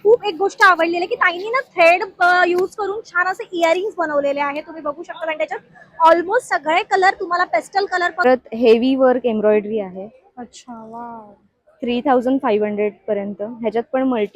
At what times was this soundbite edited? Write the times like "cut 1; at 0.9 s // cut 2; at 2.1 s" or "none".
cut 1; at 8.2 s